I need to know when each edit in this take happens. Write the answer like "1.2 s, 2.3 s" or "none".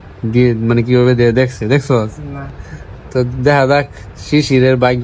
2.6 s